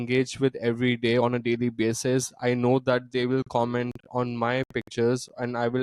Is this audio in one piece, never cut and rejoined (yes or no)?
yes